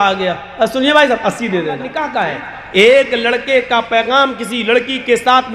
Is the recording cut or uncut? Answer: cut